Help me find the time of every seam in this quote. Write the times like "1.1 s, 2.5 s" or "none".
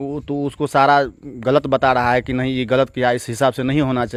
none